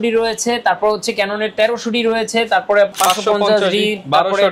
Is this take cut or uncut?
cut